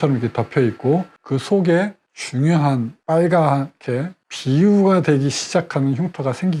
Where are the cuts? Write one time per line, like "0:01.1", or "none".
none